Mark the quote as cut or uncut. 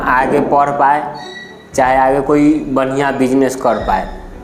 uncut